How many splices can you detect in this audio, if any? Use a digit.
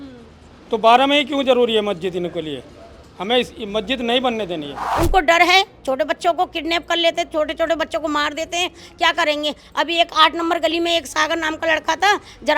1